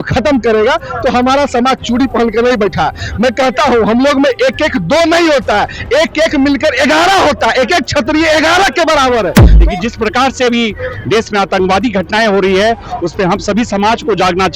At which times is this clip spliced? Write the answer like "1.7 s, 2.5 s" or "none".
9.5 s